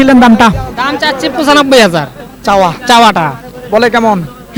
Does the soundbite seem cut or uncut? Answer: uncut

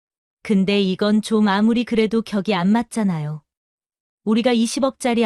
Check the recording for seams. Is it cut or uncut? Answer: uncut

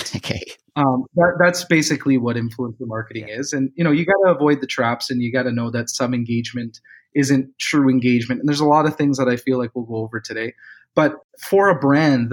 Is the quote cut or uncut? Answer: uncut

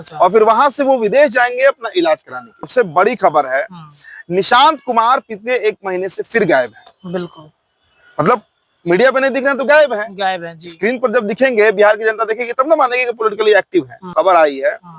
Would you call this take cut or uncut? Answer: cut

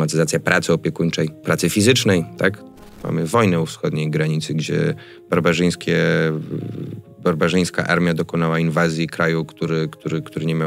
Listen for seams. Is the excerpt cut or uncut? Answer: cut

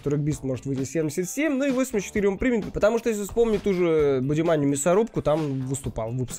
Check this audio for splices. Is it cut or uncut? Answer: uncut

